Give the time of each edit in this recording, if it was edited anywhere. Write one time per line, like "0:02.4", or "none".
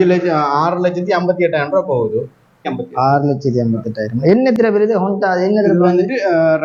none